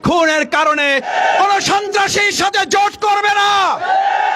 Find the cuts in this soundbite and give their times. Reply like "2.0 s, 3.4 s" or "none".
1.1 s